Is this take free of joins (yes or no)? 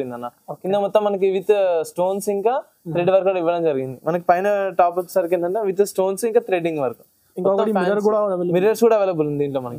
yes